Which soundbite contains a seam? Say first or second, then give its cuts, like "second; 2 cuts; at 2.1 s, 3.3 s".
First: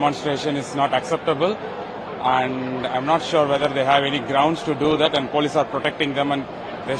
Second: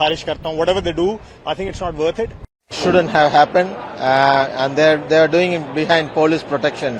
second; 1 cut; at 2.8 s